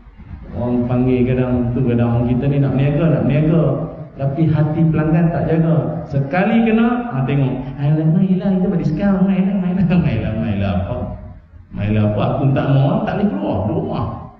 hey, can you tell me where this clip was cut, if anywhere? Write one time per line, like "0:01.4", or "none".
none